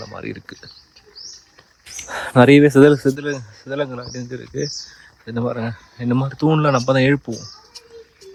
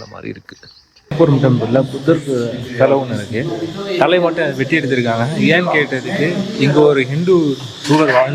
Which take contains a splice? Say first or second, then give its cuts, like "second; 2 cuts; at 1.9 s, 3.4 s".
second; 1 cut; at 1.1 s